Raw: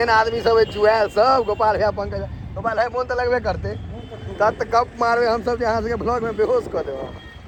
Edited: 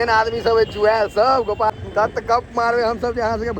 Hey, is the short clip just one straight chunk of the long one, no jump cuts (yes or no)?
no